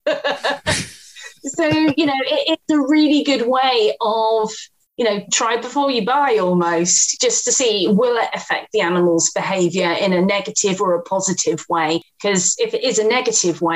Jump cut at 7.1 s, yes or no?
yes